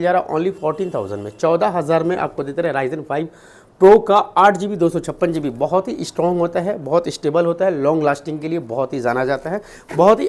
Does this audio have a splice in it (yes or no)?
no